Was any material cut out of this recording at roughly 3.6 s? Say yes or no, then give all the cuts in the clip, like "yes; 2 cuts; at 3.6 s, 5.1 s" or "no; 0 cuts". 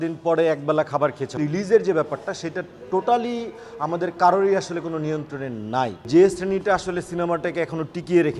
no; 2 cuts; at 1.4 s, 6.0 s